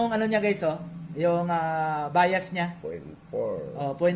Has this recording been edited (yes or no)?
no